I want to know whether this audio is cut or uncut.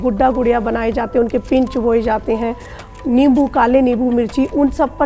uncut